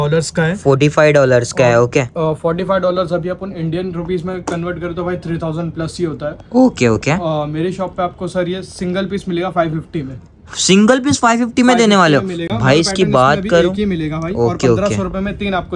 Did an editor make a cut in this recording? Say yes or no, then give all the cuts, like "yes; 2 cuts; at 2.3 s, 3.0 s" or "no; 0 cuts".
no; 0 cuts